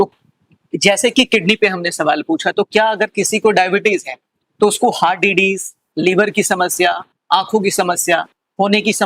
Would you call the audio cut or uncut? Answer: uncut